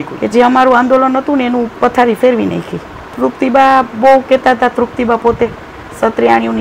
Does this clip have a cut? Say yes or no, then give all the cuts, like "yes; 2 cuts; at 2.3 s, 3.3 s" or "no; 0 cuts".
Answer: yes; 1 cut; at 3.1 s